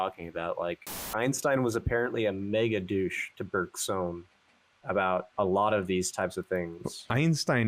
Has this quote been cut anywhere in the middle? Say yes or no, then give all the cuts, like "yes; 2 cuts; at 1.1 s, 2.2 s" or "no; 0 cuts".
yes; 1 cut; at 1.1 s